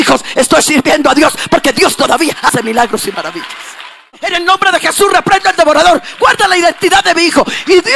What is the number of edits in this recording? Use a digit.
1